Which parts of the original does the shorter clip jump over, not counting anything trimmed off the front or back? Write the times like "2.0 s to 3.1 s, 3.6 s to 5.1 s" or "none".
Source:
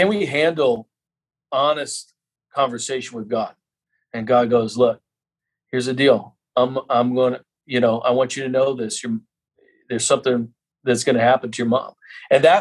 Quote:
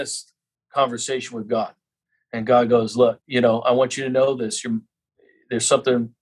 5.0 s to 7.6 s